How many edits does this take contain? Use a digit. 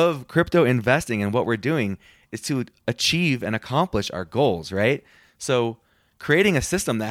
0